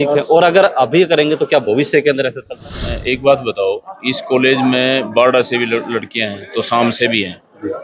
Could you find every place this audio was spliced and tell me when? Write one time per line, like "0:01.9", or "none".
0:02.9